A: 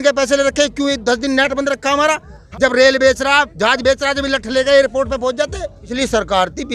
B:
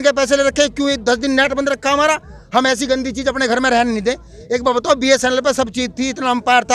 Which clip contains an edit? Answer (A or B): A